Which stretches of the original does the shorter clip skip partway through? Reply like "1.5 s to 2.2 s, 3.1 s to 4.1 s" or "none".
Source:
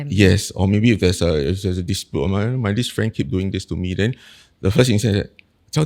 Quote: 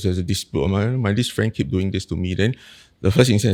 none